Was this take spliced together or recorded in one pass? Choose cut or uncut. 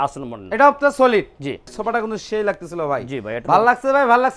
cut